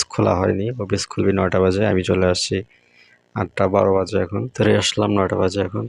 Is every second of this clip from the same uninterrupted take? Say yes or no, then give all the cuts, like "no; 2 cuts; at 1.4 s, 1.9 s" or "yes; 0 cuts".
no; 1 cut; at 4.5 s